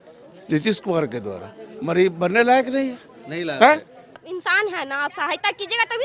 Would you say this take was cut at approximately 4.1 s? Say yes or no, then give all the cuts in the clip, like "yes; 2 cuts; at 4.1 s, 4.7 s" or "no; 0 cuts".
yes; 1 cut; at 4.1 s